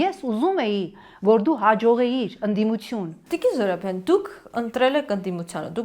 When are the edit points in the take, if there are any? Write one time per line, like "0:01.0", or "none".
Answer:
none